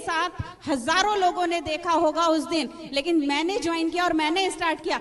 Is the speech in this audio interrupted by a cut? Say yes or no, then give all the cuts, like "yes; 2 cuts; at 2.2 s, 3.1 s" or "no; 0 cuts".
no; 0 cuts